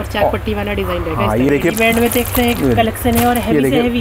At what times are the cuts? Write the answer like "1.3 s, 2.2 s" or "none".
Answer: 1.5 s